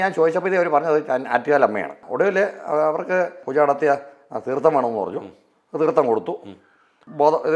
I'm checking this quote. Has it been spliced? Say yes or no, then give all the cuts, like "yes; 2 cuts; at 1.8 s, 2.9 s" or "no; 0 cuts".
no; 0 cuts